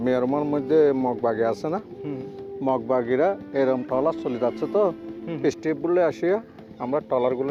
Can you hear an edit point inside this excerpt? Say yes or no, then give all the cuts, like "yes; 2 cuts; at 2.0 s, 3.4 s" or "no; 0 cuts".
no; 0 cuts